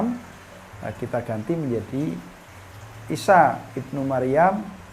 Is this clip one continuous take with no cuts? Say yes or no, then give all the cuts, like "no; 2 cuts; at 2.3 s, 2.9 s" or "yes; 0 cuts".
yes; 0 cuts